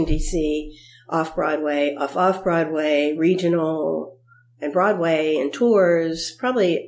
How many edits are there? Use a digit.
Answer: 0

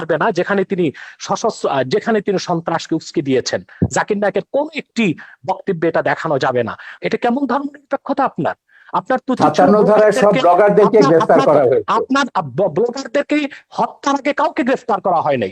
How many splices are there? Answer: 1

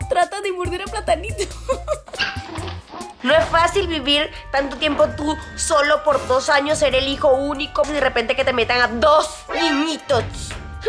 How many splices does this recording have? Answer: 2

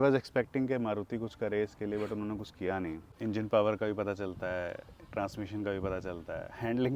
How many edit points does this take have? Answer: 1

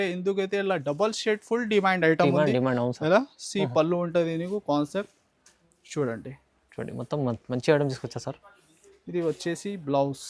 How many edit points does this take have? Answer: 0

